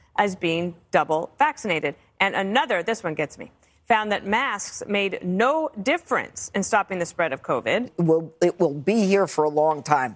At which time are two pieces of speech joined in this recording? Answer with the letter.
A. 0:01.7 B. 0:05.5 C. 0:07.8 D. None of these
C